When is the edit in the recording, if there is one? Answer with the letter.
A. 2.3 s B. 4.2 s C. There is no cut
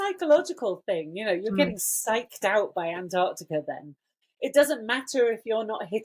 B